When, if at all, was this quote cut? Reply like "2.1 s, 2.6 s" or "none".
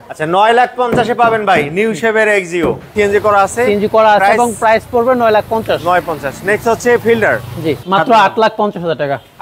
2.9 s, 7.6 s